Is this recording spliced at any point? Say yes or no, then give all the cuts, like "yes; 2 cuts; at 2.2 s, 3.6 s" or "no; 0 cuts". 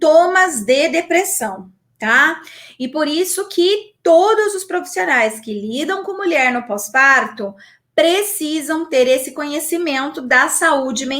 no; 0 cuts